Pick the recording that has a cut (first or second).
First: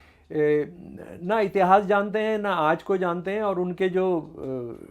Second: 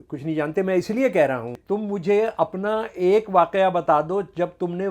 second